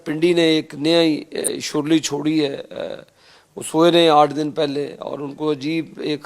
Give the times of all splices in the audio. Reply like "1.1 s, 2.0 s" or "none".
1.4 s

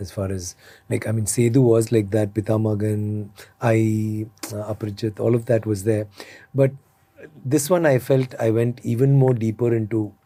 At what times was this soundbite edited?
none

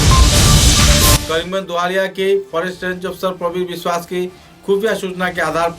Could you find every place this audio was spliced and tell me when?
1.2 s

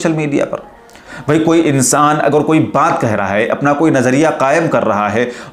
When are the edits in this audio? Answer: none

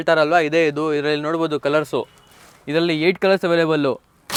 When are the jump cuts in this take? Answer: none

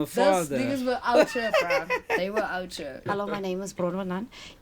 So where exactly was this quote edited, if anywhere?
3.0 s

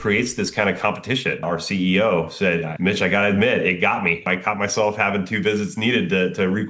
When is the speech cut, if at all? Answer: 1.4 s, 2.7 s, 4.3 s

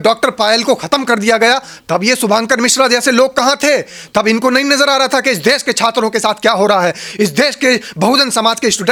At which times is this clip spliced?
none

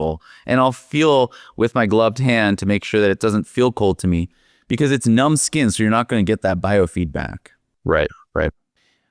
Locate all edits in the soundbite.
none

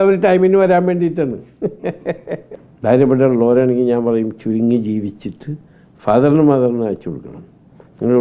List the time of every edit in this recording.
2.6 s

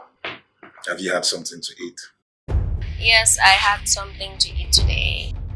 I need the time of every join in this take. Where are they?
none

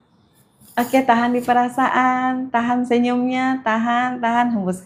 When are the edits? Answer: none

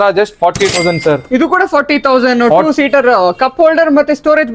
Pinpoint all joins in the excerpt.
none

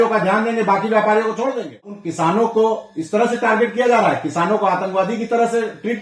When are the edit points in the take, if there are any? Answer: 2.1 s

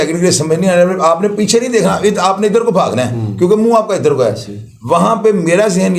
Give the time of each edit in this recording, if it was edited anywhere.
none

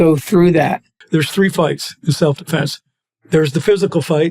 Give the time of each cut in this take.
1.0 s

